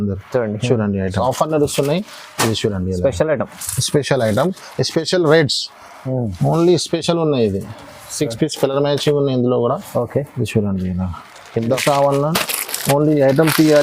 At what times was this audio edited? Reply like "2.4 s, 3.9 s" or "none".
1.2 s, 11.8 s

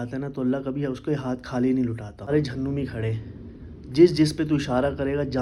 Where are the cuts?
2.3 s

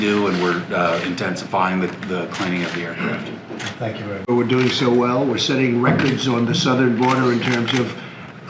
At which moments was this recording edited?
4.3 s

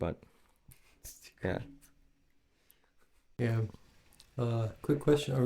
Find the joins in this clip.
3.2 s

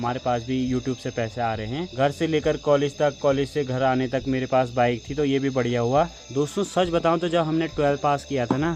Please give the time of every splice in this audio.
none

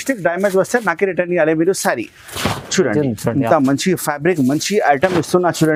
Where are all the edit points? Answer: none

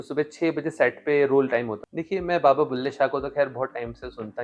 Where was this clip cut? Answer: 1.8 s

